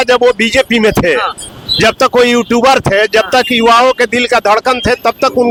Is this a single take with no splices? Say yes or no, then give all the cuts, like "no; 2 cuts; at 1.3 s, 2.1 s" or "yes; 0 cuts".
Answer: yes; 0 cuts